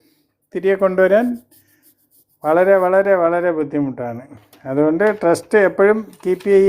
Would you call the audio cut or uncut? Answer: uncut